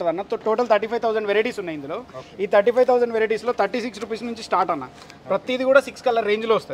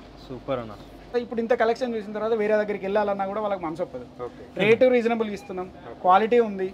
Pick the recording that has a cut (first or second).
second